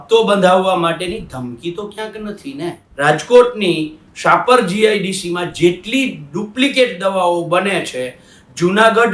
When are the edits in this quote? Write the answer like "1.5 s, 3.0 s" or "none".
2.8 s